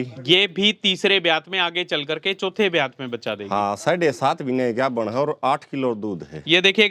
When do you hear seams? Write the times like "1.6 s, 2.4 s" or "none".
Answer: none